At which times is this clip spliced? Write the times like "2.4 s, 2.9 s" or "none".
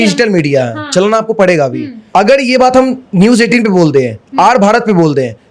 1.9 s